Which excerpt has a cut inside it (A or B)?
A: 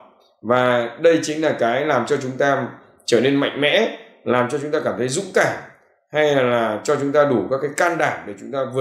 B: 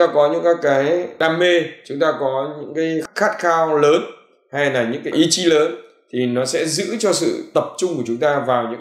B